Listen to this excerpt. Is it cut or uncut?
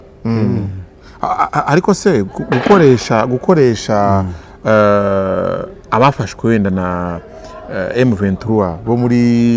uncut